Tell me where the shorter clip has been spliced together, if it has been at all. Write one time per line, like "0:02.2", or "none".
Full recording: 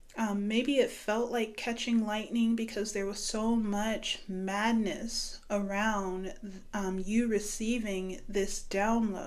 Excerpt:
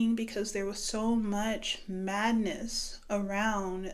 none